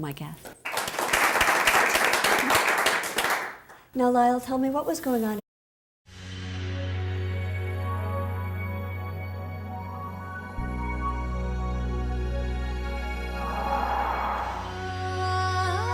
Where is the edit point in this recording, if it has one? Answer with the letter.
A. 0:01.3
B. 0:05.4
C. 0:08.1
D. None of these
D